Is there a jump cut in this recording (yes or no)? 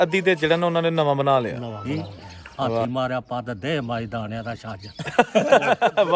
yes